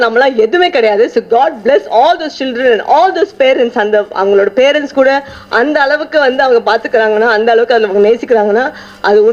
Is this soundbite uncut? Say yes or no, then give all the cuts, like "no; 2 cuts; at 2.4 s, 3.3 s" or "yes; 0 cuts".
yes; 0 cuts